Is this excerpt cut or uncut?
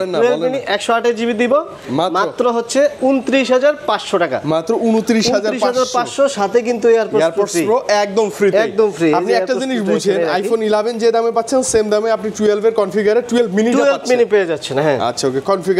uncut